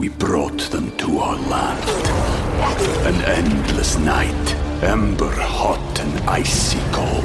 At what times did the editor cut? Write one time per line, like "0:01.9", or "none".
none